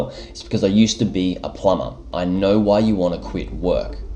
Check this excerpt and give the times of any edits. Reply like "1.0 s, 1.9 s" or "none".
2.1 s